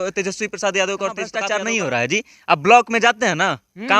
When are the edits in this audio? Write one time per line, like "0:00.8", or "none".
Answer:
0:01.4